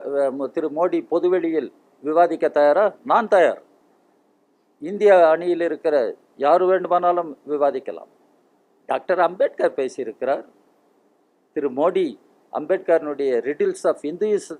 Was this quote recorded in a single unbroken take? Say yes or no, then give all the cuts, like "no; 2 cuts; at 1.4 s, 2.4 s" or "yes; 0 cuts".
yes; 0 cuts